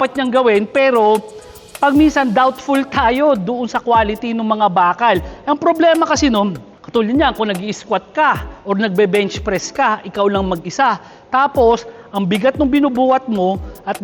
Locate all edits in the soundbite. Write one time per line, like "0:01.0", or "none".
0:06.7